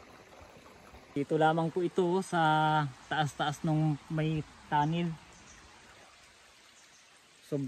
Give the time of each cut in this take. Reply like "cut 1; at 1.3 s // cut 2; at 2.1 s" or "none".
cut 1; at 1.2 s